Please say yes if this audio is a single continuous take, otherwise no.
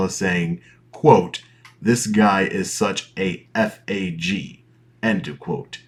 yes